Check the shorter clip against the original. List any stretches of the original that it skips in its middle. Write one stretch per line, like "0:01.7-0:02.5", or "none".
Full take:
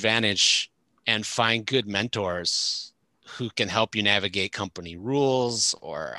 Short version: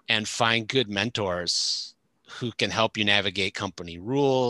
none